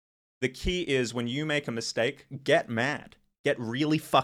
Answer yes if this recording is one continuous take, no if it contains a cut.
yes